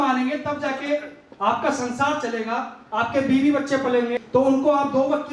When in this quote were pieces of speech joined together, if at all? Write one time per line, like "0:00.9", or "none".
0:04.2